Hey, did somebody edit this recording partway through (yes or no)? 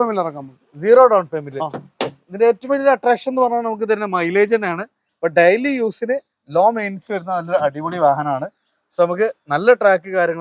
no